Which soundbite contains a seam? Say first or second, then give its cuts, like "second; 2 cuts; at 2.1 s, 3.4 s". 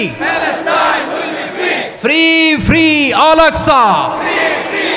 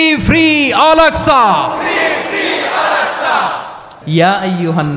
second; 1 cut; at 3.9 s